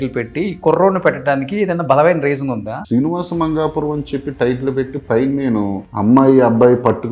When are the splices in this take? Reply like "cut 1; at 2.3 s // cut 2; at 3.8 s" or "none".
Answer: cut 1; at 2.8 s // cut 2; at 5.8 s